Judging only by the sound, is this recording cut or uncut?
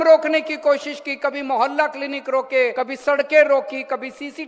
cut